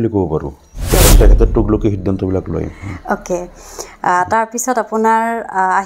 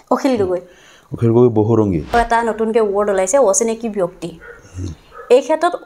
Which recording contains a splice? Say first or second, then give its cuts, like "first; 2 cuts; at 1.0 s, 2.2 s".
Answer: second; 1 cut; at 2.1 s